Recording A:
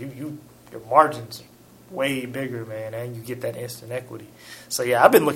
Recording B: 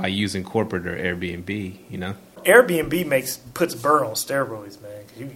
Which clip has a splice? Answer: B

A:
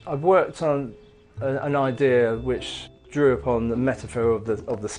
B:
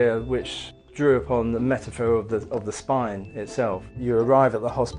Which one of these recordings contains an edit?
B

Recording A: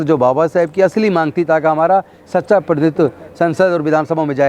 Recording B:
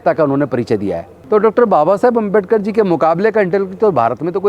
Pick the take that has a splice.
B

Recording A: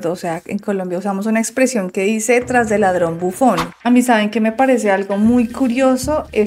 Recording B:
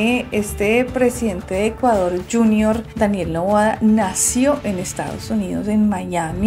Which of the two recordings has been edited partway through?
A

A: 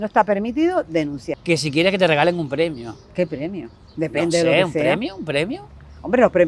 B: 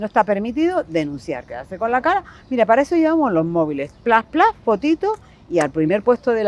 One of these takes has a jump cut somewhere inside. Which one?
A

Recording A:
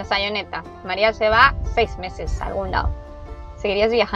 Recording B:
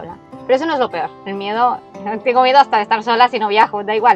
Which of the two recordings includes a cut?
B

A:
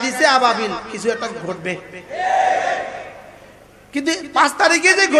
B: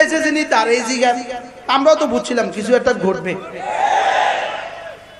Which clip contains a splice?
B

